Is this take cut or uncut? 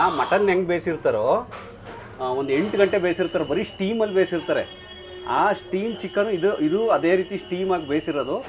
uncut